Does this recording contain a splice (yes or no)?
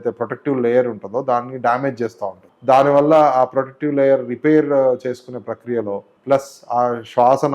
yes